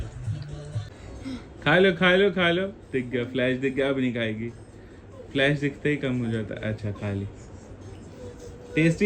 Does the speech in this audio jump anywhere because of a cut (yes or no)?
yes